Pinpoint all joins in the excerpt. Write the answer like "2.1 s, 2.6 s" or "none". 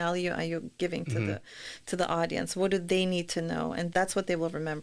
3.9 s